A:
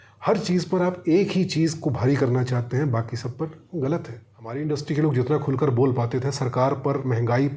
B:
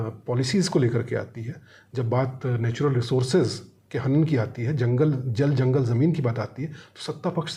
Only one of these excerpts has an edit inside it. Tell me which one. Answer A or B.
A